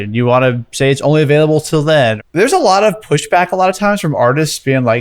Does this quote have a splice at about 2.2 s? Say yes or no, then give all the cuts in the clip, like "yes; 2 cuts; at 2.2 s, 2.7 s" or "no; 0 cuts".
yes; 1 cut; at 2.2 s